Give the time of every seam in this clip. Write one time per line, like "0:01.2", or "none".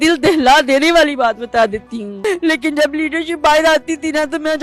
0:02.2